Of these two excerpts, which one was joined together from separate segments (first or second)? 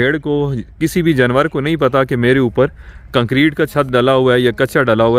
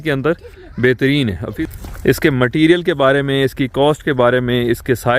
second